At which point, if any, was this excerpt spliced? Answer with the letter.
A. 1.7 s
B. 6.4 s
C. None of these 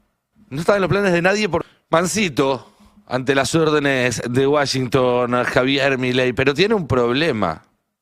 A